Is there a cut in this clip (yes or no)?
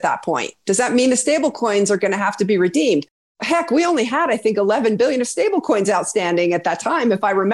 no